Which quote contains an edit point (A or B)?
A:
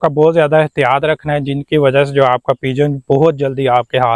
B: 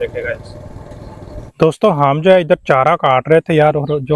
B